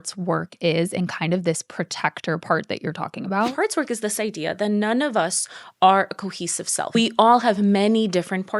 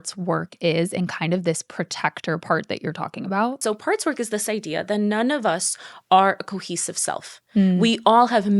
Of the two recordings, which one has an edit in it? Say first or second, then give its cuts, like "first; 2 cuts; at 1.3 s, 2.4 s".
first; 2 cuts; at 3.5 s, 6.9 s